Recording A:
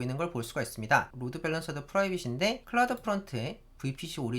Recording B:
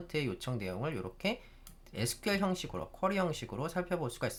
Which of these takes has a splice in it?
A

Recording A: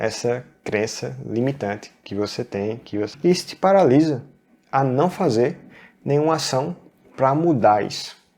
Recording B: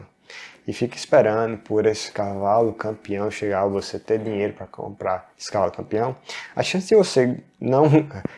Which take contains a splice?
A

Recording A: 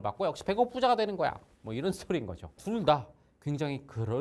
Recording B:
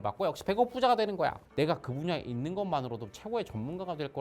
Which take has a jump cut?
B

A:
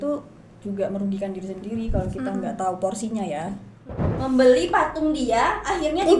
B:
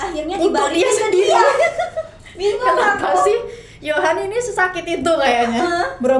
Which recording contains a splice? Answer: A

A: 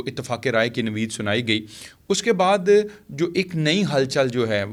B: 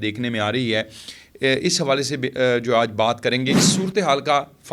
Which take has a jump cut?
B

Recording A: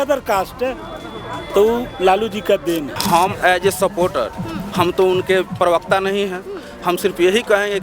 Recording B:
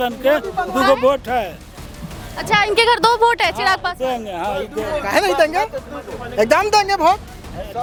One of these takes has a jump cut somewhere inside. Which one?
A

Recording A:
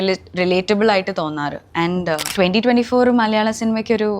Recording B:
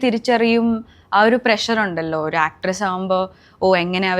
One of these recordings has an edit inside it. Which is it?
A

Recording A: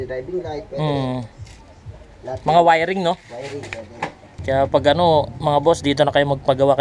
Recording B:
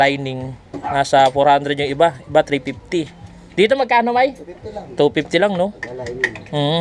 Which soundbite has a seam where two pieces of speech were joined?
A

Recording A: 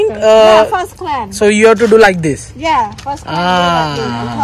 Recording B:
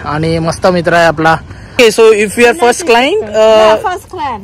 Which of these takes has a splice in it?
B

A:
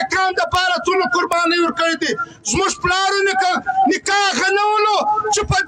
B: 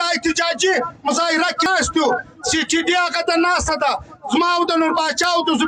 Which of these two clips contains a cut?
B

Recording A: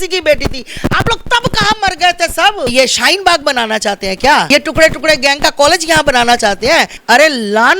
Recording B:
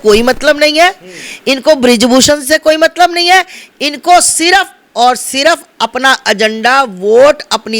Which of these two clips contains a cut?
A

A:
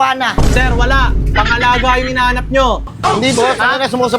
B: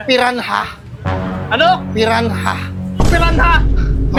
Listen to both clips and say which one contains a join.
A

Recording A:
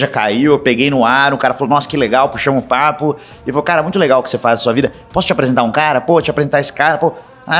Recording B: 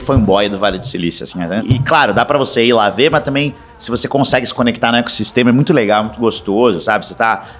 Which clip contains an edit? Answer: B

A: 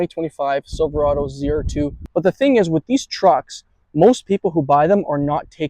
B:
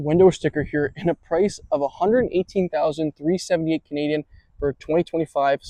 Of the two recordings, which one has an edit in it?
A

